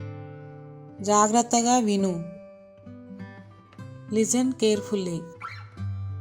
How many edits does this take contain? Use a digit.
0